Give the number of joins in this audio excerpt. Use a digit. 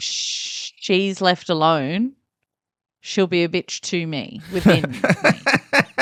0